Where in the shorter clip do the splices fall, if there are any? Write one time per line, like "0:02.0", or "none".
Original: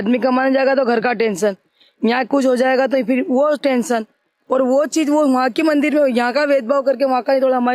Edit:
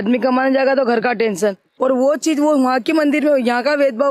0:01.7